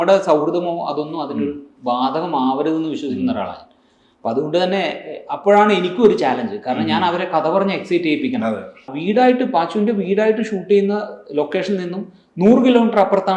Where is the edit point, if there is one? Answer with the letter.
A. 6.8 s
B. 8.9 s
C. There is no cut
B